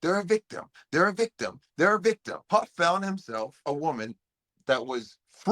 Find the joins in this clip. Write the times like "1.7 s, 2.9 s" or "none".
2.3 s, 3.6 s

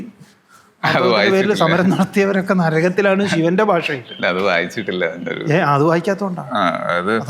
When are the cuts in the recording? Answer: none

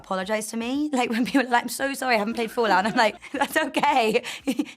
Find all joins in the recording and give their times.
3.2 s

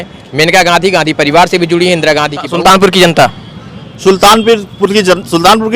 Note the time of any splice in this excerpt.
2.4 s

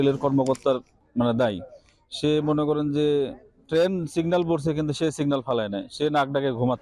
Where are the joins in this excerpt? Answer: 1.0 s

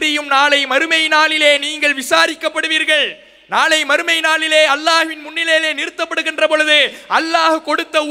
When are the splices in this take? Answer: none

